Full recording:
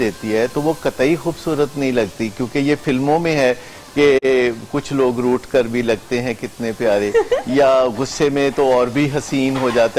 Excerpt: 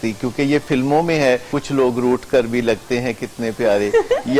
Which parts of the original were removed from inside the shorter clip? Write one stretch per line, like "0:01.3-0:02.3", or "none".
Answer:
0:03.7-0:04.7